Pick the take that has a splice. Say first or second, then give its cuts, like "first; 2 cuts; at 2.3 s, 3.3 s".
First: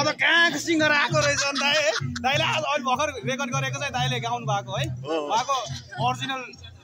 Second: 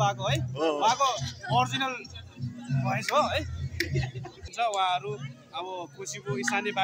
second; 1 cut; at 4.4 s